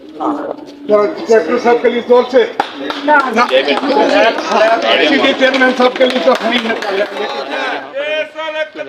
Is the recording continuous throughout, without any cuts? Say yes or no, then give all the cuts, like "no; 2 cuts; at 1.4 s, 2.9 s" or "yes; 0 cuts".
no; 1 cut; at 7.2 s